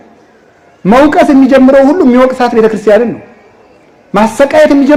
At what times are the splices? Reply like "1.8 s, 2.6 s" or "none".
none